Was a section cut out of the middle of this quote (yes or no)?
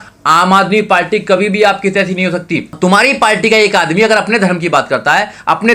yes